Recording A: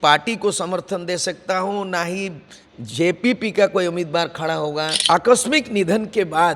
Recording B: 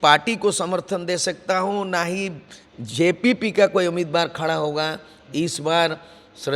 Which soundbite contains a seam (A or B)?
A